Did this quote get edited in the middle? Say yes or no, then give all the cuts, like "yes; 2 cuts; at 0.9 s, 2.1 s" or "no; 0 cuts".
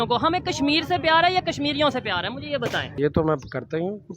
yes; 1 cut; at 2.9 s